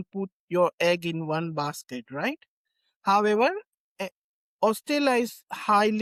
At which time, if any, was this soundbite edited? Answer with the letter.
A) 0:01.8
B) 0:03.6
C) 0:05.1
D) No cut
D